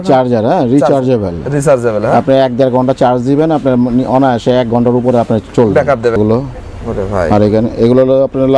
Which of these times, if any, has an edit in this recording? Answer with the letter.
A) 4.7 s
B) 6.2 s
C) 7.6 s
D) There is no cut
B